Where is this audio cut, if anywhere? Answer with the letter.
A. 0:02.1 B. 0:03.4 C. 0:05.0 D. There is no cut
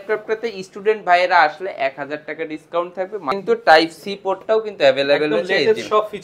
B